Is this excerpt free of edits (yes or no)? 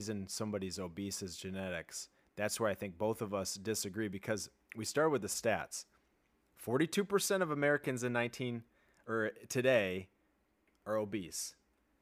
yes